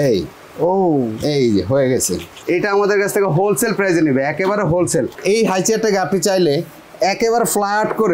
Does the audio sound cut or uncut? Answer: cut